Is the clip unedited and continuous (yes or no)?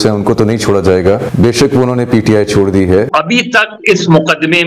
no